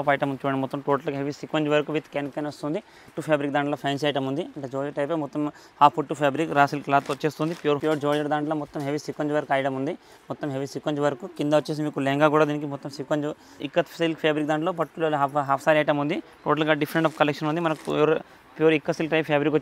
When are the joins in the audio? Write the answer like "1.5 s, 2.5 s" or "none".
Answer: 3.1 s, 7.8 s, 13.5 s